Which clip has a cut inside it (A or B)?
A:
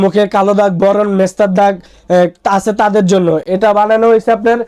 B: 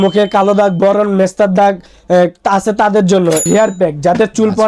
B